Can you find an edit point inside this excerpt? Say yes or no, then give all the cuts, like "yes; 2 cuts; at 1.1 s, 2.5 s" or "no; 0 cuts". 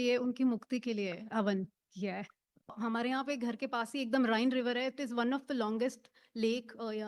yes; 1 cut; at 2.7 s